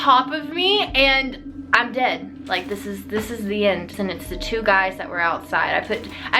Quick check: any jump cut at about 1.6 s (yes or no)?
yes